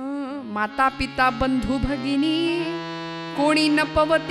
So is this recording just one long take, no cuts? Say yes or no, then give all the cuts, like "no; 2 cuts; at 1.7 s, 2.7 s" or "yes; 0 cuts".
yes; 0 cuts